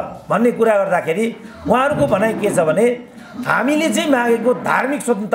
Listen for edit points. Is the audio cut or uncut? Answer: uncut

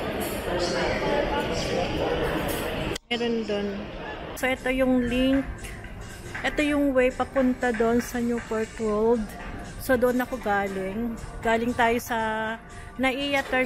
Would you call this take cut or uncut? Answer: cut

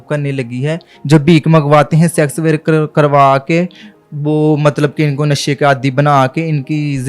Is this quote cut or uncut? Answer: cut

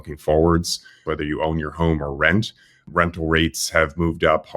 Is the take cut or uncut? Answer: cut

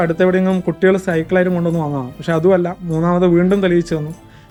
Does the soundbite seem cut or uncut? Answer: uncut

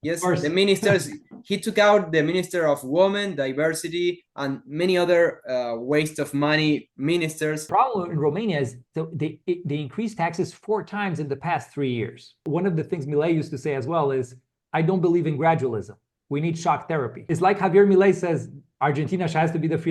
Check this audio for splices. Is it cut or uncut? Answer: cut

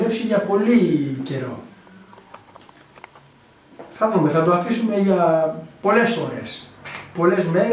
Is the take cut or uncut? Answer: uncut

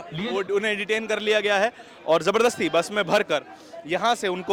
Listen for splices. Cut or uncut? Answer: uncut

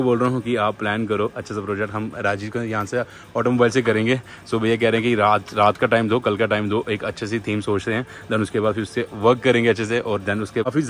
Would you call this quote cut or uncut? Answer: uncut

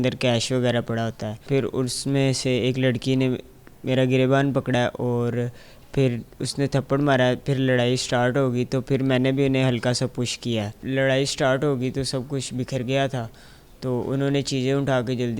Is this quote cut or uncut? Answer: cut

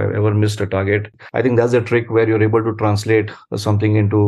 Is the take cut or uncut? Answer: cut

